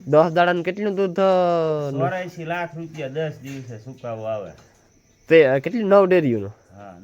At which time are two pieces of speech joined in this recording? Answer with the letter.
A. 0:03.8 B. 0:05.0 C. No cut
C